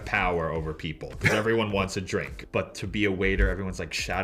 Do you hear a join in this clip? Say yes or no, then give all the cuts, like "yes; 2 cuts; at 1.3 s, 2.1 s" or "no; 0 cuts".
yes; 1 cut; at 2.4 s